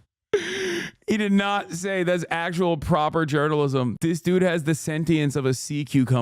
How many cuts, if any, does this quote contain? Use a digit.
1